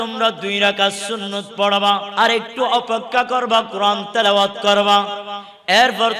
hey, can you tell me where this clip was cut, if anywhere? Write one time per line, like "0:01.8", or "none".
0:02.1